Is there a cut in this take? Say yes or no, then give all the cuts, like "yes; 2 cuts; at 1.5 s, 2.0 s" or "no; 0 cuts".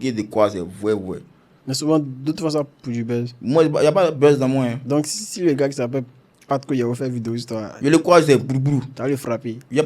no; 0 cuts